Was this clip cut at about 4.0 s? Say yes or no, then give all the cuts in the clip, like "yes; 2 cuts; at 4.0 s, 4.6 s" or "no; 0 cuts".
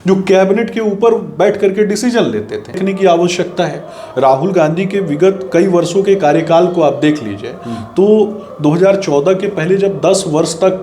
no; 1 cut; at 2.8 s